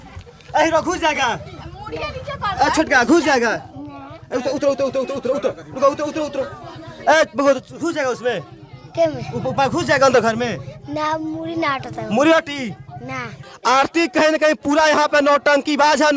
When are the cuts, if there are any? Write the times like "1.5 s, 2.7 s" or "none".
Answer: 13.4 s

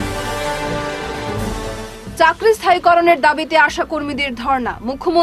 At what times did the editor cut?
1.3 s

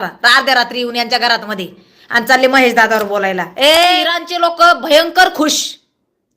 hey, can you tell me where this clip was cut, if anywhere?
4.2 s

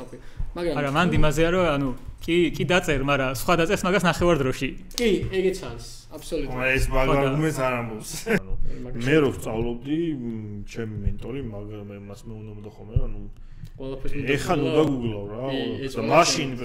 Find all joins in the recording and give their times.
8.4 s

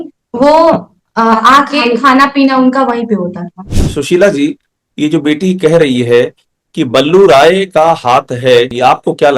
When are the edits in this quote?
3.7 s

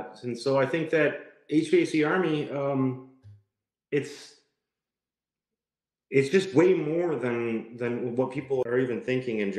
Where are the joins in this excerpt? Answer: 8.6 s

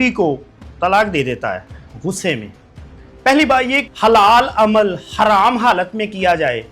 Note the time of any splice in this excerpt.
1.8 s, 3.9 s

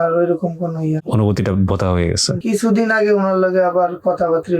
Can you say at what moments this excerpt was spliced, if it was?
2.4 s

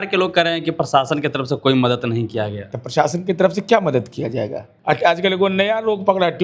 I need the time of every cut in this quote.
4.7 s

